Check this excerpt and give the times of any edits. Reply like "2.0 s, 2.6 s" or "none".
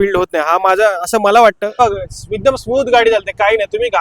1.8 s